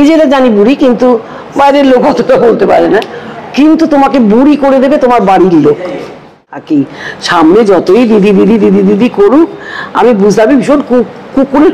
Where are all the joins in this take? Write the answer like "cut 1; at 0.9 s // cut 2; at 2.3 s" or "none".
cut 1; at 6.5 s